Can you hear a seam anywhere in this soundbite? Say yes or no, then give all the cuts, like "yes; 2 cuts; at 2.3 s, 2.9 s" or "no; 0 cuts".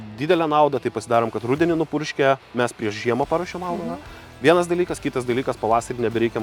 no; 0 cuts